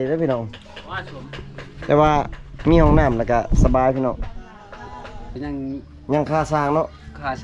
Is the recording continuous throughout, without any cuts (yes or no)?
no